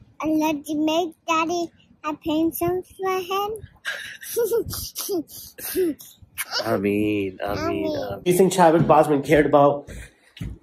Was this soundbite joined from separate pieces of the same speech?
yes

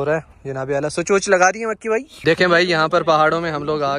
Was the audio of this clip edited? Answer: yes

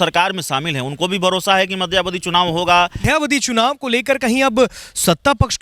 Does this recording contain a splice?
yes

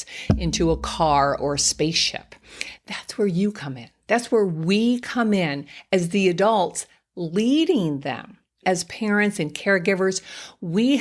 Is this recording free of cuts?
yes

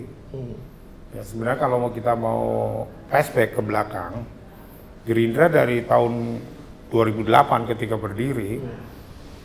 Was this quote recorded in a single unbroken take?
yes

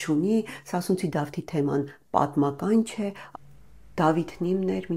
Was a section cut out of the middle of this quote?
yes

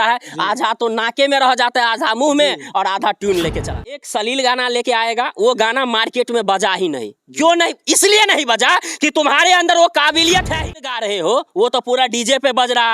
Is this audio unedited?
no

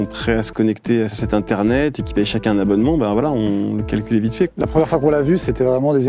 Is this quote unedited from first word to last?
no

